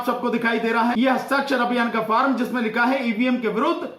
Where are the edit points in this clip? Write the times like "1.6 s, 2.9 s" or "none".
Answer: 0.9 s